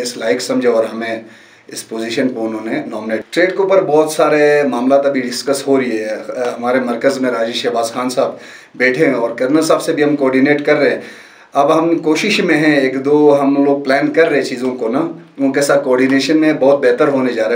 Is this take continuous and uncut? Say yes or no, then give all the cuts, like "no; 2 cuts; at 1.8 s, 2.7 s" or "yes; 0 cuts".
no; 1 cut; at 3.2 s